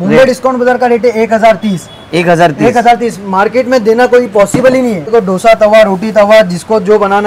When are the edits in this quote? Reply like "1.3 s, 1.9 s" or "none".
5.0 s